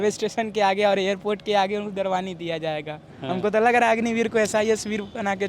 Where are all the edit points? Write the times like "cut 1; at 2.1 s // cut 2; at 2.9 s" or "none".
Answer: cut 1; at 3.1 s